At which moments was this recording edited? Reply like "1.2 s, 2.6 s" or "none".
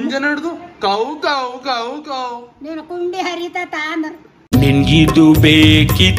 none